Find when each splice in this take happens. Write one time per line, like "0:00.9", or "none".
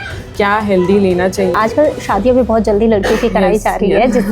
0:01.6